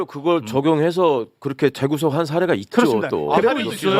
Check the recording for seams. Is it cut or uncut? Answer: uncut